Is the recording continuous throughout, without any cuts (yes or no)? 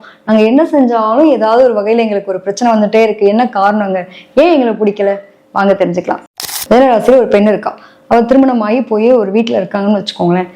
no